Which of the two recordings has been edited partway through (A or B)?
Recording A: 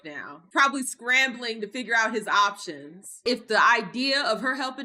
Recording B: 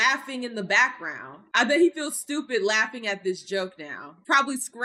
A